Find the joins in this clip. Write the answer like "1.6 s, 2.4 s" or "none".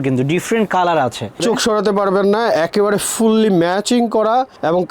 1.4 s